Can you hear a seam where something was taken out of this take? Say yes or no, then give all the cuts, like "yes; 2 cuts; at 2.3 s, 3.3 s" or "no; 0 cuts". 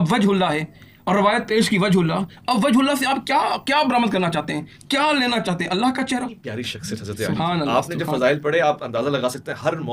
yes; 1 cut; at 6.4 s